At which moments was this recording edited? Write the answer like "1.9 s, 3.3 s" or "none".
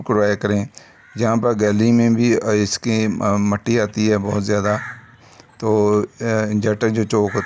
none